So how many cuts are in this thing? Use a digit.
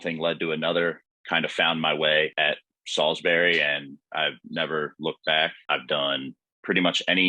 3